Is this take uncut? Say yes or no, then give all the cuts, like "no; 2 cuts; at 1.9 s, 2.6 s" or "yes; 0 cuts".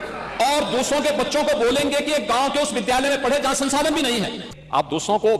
no; 1 cut; at 4.4 s